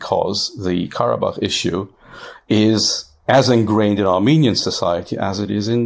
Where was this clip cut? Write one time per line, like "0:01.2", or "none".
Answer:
none